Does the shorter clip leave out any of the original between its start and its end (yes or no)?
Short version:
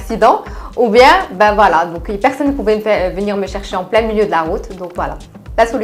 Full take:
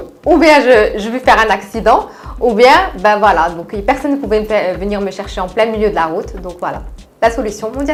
no